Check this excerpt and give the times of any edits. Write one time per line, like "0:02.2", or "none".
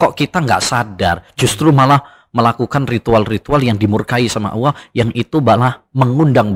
none